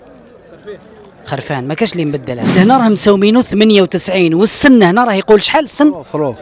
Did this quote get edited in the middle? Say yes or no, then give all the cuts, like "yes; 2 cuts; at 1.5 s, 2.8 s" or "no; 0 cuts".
yes; 1 cut; at 2.5 s